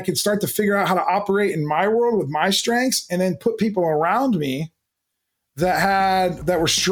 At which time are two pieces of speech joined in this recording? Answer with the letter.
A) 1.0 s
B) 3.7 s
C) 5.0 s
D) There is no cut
D